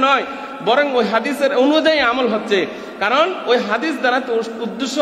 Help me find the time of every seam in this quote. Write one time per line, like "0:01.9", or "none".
none